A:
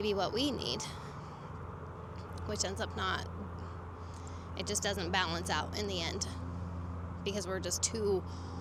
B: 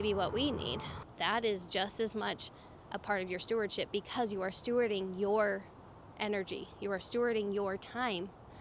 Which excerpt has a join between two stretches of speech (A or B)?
B